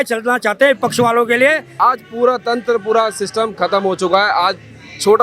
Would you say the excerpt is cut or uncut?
cut